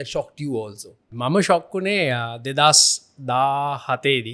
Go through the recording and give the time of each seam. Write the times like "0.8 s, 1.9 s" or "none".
1.1 s